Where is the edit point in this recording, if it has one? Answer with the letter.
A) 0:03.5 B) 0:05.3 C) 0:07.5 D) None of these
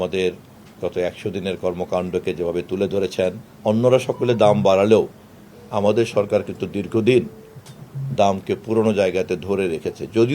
A